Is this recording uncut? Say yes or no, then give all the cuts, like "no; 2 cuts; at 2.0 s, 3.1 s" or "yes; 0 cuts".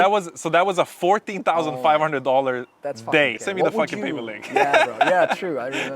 no; 1 cut; at 3.4 s